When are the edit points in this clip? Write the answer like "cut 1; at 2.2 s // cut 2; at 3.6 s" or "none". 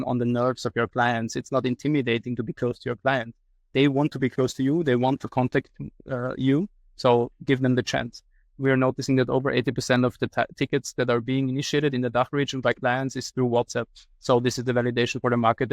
cut 1; at 8.6 s